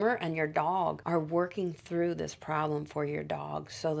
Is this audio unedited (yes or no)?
yes